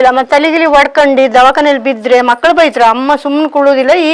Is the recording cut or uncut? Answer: uncut